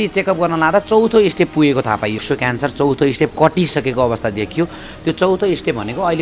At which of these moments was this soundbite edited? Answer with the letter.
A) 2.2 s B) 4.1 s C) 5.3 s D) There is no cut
A